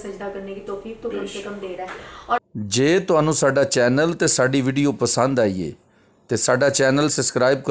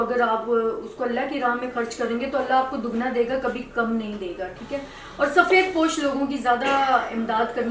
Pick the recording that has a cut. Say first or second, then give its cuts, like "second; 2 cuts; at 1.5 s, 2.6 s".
first; 1 cut; at 2.4 s